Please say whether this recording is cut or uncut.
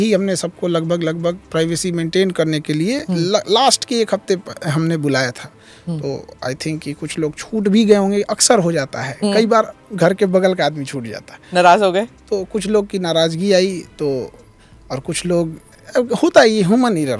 uncut